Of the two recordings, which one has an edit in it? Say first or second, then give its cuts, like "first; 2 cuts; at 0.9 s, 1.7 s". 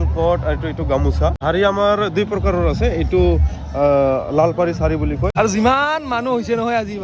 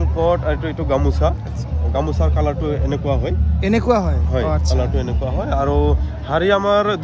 first; 2 cuts; at 1.4 s, 5.3 s